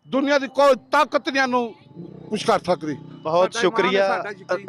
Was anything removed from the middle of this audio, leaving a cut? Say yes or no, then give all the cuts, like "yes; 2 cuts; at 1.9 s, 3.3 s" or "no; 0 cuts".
no; 0 cuts